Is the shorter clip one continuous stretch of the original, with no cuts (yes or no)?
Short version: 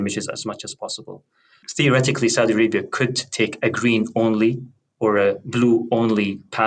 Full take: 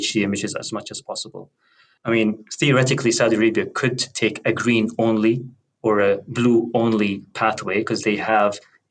no